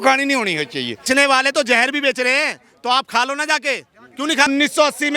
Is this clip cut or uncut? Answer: cut